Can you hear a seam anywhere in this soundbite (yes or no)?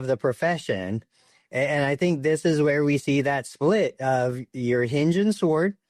no